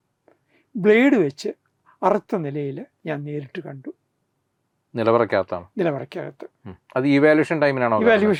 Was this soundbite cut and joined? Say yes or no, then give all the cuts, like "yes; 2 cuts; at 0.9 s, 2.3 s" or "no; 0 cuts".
no; 0 cuts